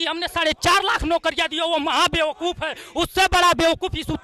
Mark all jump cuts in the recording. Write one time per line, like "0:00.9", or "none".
none